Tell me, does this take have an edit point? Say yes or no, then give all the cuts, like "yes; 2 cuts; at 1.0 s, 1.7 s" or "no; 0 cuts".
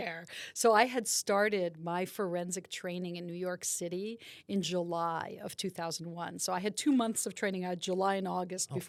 no; 0 cuts